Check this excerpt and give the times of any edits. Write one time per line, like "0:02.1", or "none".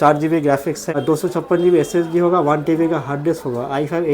0:01.0